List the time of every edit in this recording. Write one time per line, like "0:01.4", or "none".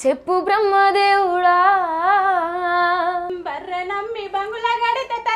0:03.3